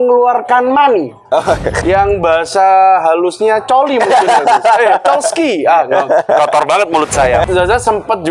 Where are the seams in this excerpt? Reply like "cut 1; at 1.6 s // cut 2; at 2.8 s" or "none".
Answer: cut 1; at 1.8 s // cut 2; at 7.5 s